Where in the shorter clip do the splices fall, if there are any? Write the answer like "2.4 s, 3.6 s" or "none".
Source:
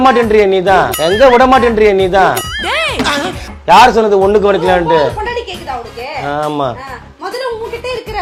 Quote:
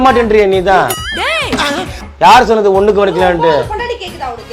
0.9 s

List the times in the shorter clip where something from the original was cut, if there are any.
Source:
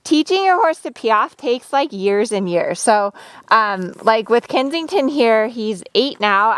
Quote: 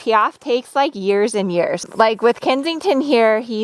1.8 s

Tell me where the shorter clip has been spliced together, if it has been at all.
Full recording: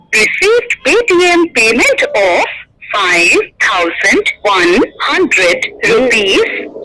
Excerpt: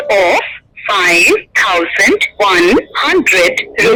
none

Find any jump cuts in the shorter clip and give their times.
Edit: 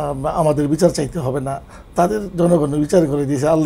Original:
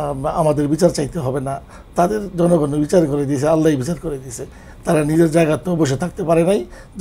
none

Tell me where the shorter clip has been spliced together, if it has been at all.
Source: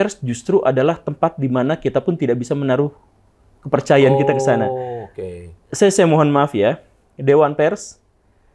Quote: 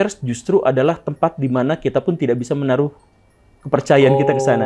none

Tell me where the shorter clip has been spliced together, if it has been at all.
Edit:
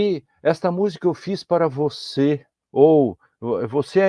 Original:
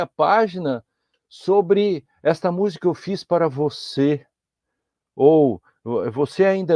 2.5 s

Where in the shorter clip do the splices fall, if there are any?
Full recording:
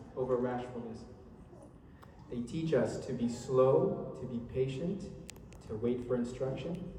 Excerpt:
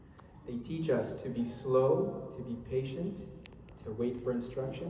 none

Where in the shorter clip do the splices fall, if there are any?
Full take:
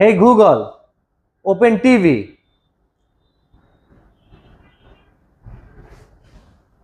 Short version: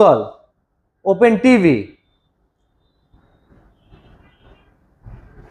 none

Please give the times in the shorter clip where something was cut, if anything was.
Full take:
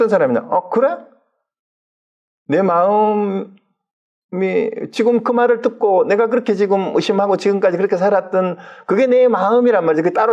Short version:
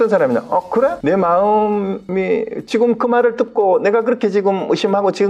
1.0 s, 2.0 s

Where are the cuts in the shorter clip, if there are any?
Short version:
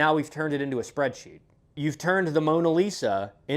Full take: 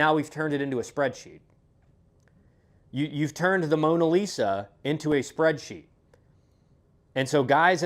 1.8 s

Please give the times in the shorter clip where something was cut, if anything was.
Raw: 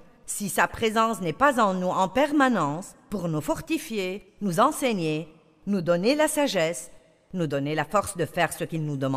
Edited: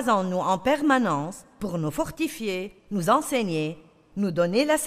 none

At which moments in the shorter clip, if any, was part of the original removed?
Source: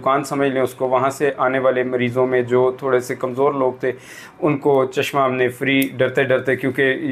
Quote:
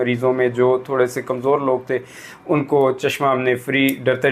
none

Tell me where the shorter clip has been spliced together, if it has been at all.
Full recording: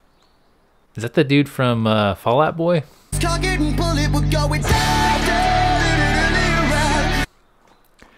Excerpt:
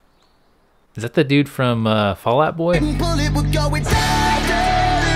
2.8 s

